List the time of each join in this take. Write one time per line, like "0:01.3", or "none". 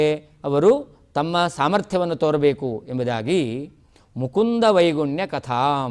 none